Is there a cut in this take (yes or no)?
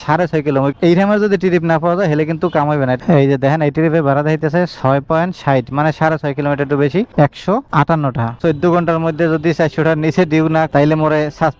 yes